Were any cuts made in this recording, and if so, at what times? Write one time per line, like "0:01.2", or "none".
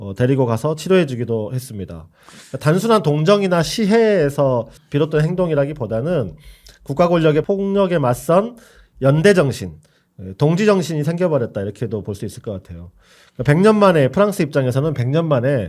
0:04.8
0:07.4